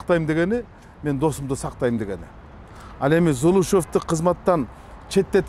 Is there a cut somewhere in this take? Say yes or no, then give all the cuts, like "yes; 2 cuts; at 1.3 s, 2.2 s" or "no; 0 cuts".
no; 0 cuts